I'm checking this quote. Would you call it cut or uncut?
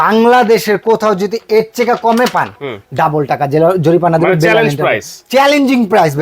uncut